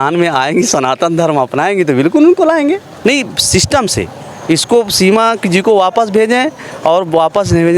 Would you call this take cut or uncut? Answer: cut